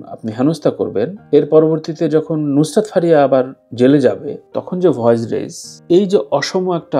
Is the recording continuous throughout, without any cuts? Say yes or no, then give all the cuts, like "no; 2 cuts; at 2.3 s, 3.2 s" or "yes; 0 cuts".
yes; 0 cuts